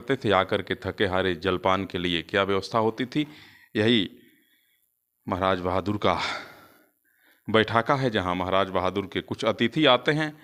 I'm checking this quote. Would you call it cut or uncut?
uncut